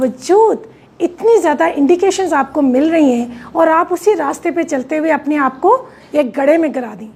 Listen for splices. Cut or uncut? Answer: uncut